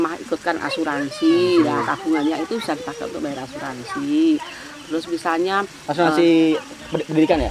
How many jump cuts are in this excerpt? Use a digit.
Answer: 0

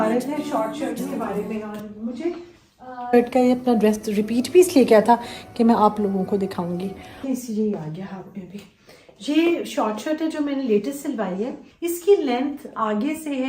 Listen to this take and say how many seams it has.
3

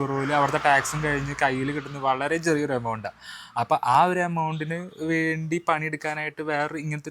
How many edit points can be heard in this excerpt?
0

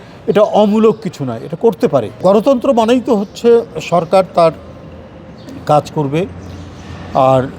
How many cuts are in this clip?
1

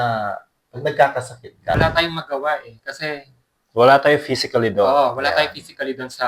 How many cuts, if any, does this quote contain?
1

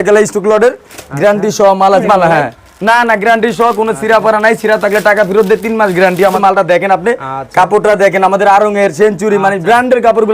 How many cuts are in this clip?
2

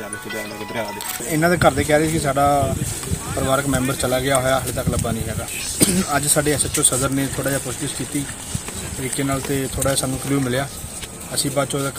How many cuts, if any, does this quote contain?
2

